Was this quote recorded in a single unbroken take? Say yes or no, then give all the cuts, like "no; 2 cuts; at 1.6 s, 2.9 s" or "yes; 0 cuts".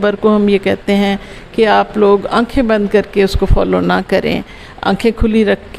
yes; 0 cuts